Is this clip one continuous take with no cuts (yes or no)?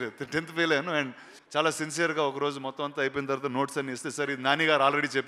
no